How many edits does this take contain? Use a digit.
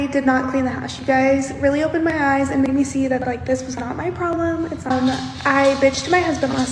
1